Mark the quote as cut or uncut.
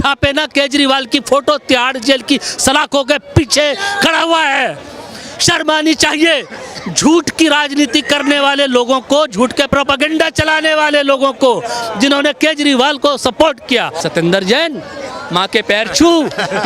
cut